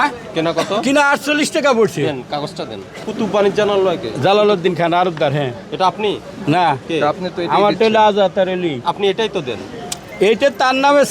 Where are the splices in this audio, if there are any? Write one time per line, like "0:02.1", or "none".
0:03.0